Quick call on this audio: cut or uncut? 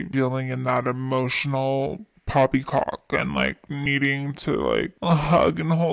uncut